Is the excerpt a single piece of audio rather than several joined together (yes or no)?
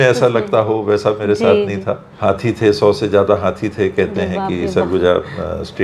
no